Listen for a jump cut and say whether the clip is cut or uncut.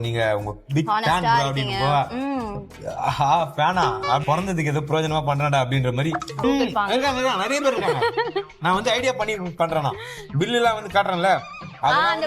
cut